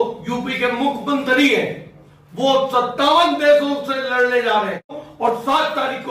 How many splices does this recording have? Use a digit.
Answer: 1